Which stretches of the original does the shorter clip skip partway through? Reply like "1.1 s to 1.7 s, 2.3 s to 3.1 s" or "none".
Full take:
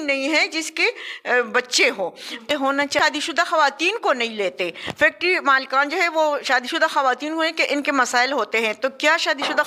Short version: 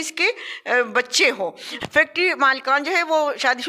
2.3 s to 4.8 s